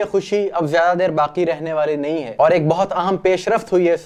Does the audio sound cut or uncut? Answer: uncut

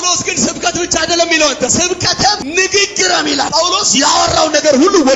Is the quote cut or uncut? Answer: cut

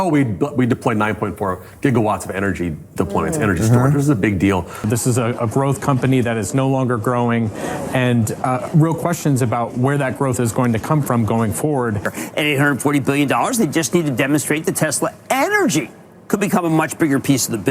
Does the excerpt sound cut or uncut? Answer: cut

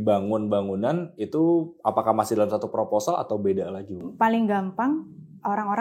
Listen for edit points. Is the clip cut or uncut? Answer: cut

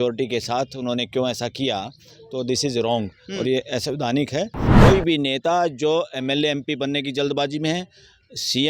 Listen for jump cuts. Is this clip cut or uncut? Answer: cut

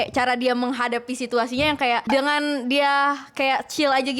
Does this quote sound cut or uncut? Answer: uncut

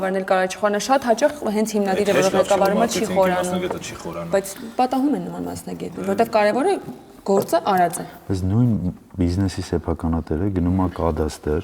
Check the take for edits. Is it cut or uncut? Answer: uncut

